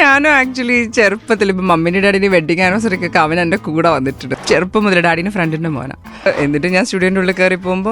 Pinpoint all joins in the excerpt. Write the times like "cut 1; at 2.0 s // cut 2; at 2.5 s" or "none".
cut 1; at 4.3 s // cut 2; at 6.3 s